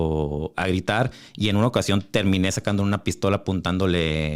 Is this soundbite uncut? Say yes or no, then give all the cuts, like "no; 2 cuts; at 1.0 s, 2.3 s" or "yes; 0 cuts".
yes; 0 cuts